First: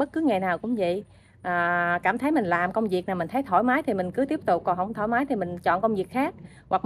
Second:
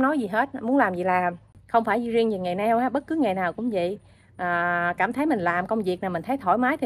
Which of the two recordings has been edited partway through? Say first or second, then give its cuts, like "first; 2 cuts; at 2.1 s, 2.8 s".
second; 1 cut; at 1.5 s